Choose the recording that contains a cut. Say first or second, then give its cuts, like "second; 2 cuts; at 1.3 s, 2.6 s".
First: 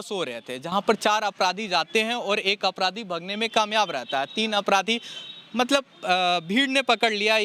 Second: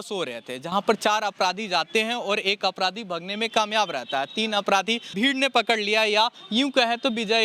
second; 1 cut; at 5.1 s